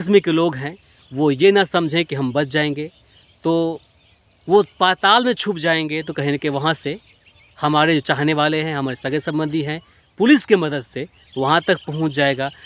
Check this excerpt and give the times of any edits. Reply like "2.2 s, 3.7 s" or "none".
none